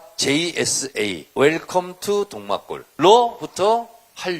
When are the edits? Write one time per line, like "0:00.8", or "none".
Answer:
0:01.2
0:02.8